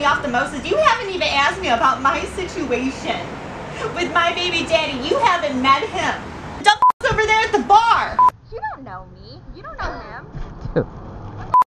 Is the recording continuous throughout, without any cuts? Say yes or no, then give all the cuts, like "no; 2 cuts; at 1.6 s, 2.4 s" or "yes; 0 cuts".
no; 1 cut; at 8.3 s